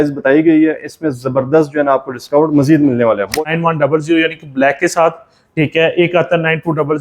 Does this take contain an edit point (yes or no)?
yes